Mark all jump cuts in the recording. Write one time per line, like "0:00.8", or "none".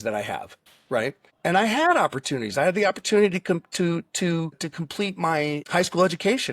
0:01.3